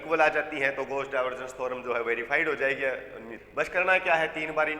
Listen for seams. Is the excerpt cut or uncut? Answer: cut